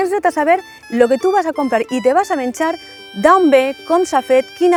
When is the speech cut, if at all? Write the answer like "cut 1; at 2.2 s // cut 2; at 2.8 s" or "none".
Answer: none